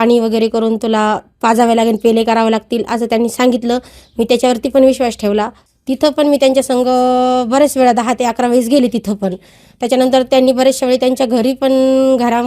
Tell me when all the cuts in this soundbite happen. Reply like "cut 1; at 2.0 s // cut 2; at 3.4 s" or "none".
cut 1; at 5.7 s